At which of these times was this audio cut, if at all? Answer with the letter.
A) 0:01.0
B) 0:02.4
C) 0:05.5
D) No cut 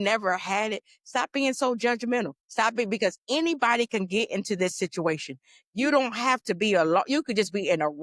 B